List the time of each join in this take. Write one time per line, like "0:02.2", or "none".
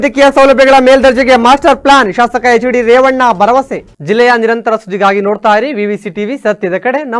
none